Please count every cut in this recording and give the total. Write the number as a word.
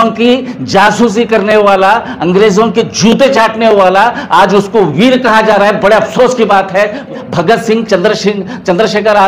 one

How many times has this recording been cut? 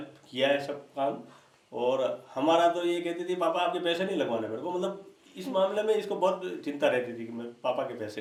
zero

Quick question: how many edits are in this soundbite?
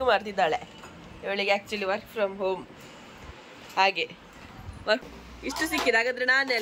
one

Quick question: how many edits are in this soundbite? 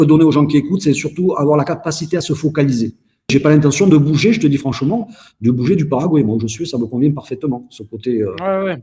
one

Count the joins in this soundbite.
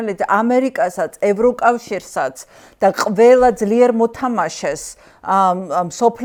zero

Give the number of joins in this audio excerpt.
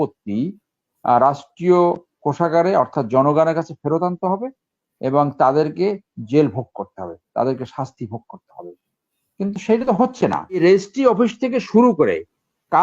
one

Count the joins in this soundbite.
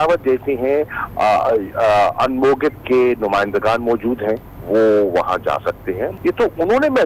two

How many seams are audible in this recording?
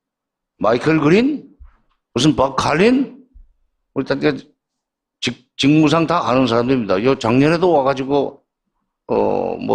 zero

